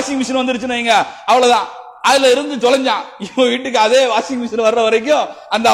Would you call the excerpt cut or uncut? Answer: uncut